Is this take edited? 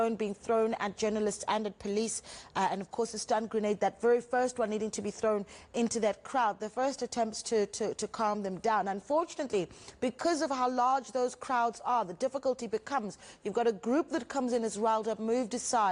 no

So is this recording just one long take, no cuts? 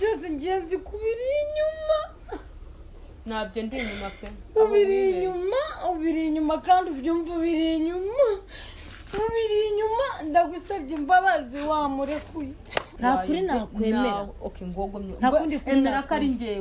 no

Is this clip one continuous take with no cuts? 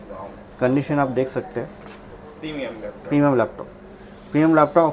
yes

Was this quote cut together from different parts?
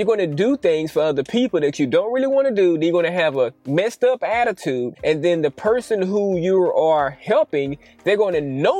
no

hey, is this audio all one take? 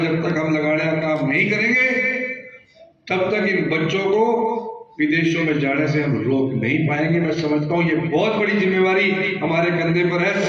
yes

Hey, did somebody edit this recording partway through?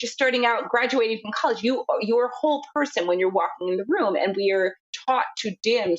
yes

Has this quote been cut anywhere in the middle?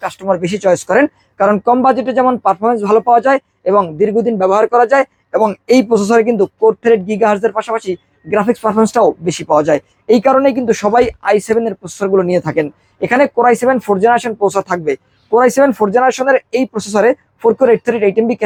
no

